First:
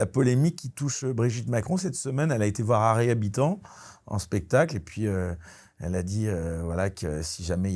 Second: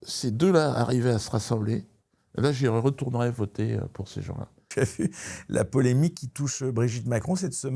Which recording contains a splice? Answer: second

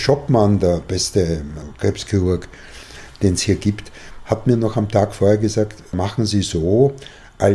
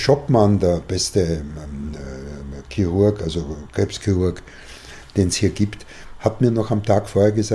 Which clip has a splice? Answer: first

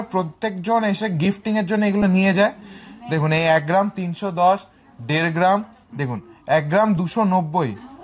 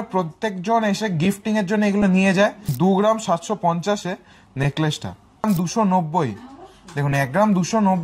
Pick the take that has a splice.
second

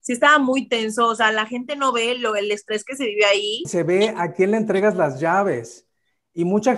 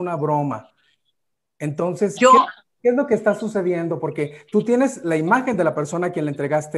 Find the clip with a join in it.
first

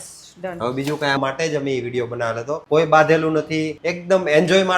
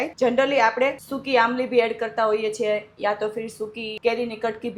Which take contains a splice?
first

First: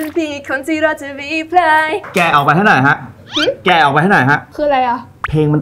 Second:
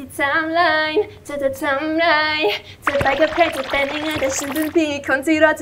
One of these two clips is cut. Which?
first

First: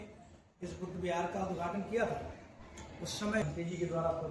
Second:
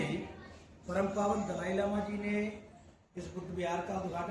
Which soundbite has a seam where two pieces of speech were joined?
first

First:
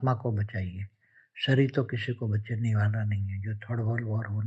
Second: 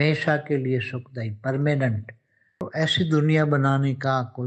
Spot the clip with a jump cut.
second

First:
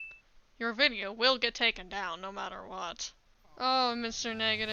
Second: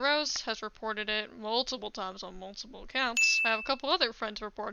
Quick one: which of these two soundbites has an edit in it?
first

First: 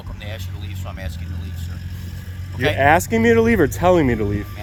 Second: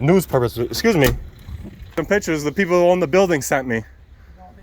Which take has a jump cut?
second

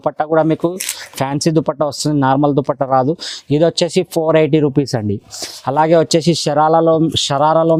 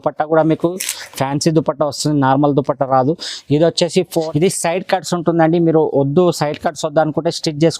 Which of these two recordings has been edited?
second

